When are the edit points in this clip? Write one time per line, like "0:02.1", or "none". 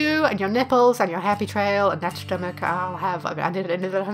none